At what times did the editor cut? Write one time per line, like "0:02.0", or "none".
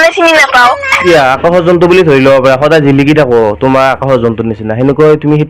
0:00.9